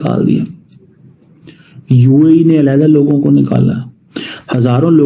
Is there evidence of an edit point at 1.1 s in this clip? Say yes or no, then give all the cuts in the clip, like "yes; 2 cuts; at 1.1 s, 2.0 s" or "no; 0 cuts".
no; 0 cuts